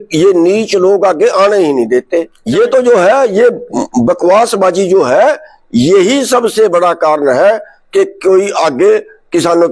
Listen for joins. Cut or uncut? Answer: cut